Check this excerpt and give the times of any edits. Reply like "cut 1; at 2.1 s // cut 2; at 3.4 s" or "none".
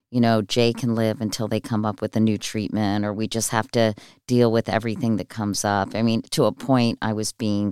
none